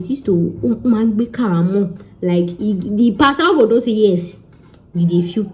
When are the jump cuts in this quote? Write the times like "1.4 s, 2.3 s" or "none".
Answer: none